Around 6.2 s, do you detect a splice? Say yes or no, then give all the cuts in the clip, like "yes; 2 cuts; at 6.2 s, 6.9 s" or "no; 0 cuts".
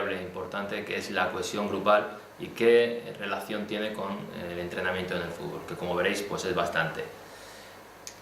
yes; 1 cut; at 6.2 s